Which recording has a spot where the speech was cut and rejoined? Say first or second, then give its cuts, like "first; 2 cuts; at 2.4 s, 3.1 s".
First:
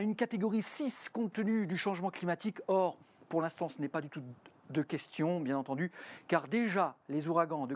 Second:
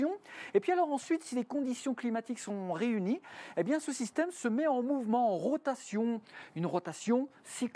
first; 1 cut; at 1.0 s